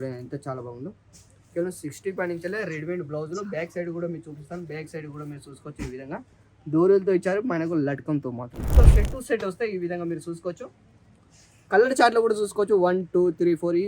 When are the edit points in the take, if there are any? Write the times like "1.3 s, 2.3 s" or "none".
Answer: 8.7 s

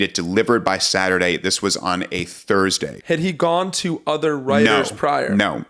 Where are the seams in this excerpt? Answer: none

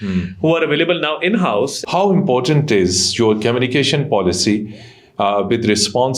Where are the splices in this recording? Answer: 1.8 s

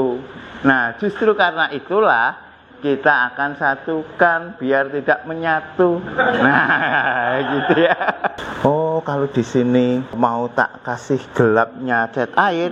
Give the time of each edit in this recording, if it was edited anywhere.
8.4 s, 10.1 s

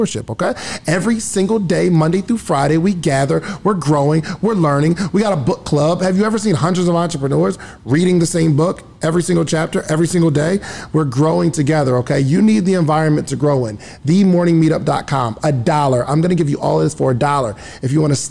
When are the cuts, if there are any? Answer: none

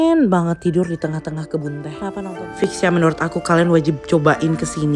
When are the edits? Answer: 2.6 s

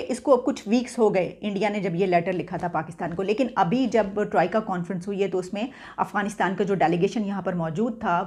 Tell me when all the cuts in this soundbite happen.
none

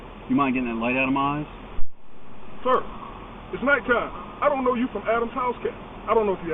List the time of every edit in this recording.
none

